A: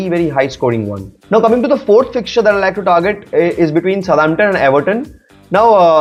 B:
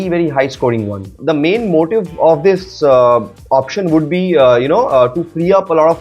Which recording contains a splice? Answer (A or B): B